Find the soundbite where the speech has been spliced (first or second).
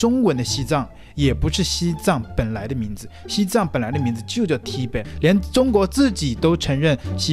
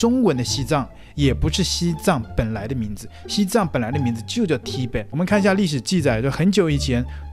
first